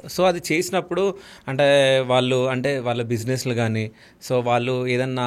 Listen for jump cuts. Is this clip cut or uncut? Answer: uncut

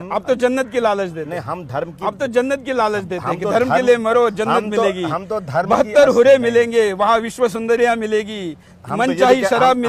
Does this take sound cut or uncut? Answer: uncut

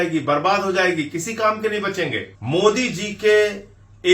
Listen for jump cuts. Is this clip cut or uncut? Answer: cut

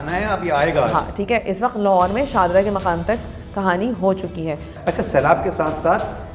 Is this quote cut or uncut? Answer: cut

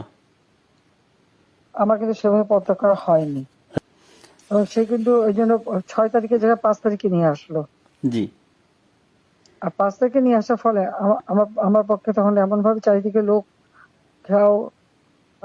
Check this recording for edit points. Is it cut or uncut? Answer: cut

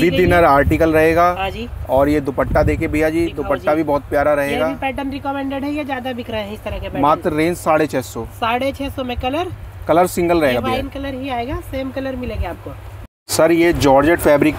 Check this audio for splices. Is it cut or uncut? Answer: uncut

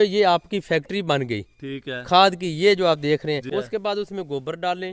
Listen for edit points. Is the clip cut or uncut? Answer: cut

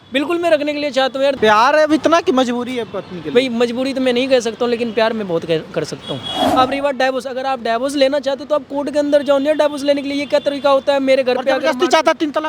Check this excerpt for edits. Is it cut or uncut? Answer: cut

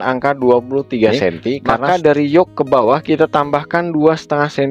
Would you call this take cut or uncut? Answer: cut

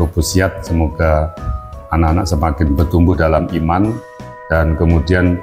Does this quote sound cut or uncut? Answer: uncut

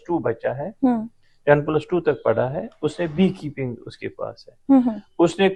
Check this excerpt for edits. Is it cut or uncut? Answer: uncut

